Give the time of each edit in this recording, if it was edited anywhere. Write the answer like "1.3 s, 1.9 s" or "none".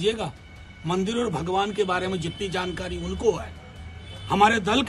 none

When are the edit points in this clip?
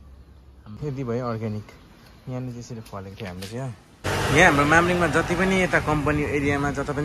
0.8 s, 3.9 s

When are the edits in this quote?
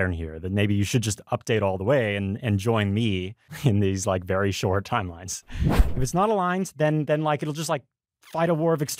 3.5 s, 5.8 s

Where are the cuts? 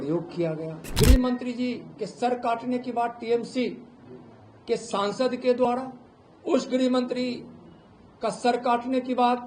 0.9 s

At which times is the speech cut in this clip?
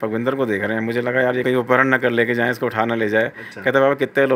1.4 s

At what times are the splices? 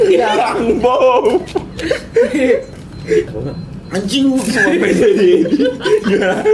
3.3 s

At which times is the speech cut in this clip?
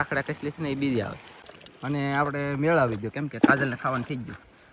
1.5 s

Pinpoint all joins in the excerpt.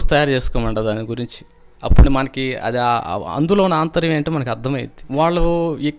5.0 s

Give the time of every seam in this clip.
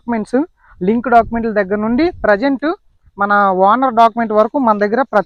none

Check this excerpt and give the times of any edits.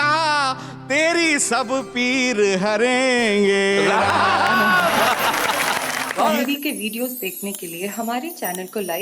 6.3 s

